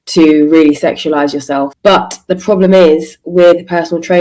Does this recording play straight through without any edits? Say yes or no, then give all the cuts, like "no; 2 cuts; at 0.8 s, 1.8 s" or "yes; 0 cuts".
no; 1 cut; at 1.7 s